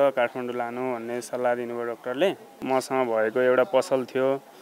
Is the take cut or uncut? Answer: cut